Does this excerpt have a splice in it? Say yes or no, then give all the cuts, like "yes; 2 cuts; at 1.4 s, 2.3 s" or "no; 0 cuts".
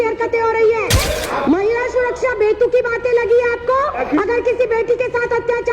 yes; 2 cuts; at 1.1 s, 4.0 s